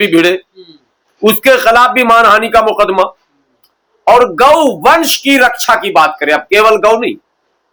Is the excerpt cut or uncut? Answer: uncut